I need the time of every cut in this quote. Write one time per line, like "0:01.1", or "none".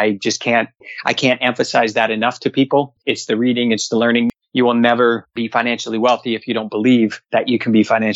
0:03.0
0:04.3
0:05.3
0:07.2